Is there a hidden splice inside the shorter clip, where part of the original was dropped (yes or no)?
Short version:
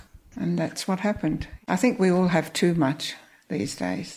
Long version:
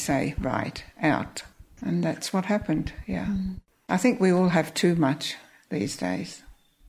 yes